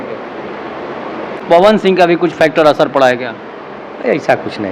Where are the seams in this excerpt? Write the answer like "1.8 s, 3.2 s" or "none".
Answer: 1.4 s